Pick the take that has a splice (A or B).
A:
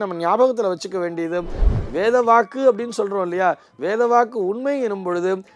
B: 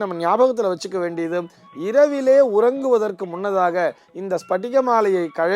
A